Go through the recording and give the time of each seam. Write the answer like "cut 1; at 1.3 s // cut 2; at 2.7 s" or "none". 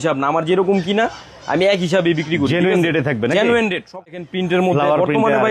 cut 1; at 4.1 s